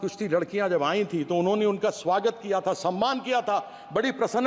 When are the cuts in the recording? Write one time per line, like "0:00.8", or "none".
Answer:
none